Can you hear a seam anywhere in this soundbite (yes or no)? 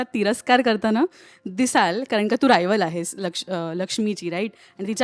no